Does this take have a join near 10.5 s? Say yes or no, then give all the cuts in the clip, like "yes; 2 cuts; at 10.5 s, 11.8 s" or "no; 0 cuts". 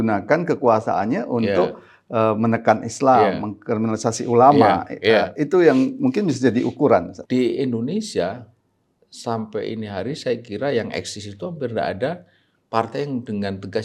no; 1 cut; at 7.2 s